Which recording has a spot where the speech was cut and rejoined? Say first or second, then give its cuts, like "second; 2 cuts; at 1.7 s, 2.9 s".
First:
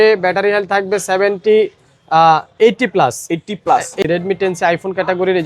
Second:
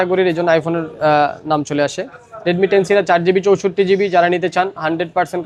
first; 1 cut; at 4.0 s